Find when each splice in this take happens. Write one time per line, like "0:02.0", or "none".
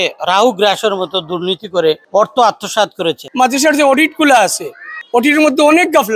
0:02.0
0:03.2
0:05.0